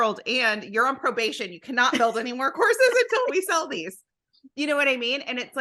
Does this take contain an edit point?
no; 0 cuts

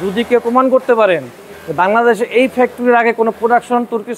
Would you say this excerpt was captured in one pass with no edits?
yes; 0 cuts

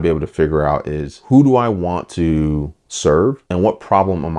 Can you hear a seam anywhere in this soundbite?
yes; 1 cut; at 3.4 s

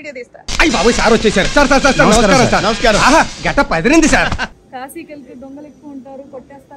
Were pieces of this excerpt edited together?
yes; 1 cut; at 4.6 s

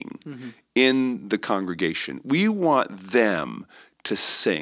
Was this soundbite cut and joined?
no; 0 cuts

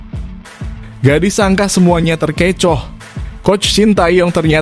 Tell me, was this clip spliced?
yes; 1 cut; at 1.0 s

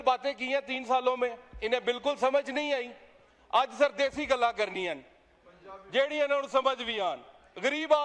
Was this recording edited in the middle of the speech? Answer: no; 0 cuts

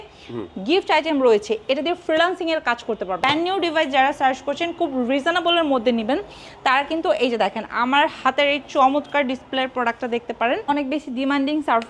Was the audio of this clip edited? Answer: yes; 2 cuts; at 3.2 s, 10.7 s

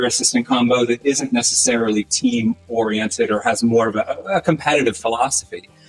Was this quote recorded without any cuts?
yes; 0 cuts

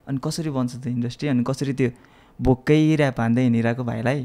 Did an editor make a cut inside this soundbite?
no; 0 cuts

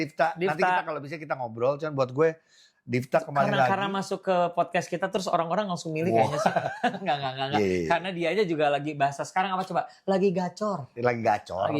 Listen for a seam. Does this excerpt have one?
no; 0 cuts

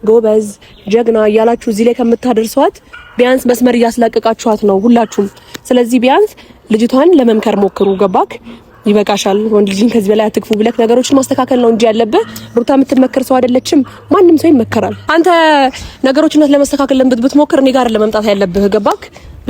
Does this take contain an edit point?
yes; 1 cut; at 15.0 s

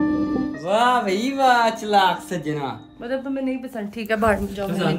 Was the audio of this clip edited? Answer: no; 0 cuts

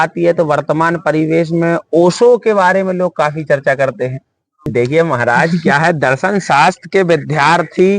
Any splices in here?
yes; 1 cut; at 4.7 s

